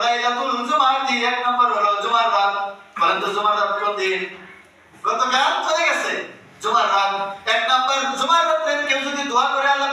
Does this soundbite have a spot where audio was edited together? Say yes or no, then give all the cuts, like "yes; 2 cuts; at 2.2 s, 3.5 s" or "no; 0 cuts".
yes; 1 cut; at 4.9 s